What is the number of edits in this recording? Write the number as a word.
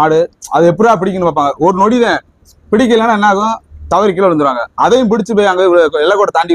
zero